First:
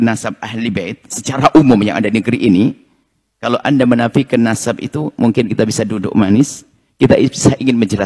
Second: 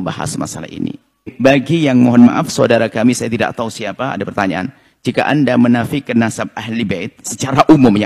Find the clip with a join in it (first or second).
second